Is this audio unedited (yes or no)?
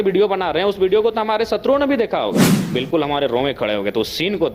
no